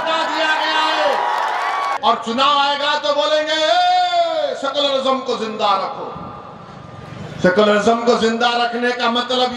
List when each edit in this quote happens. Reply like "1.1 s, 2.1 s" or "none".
1.9 s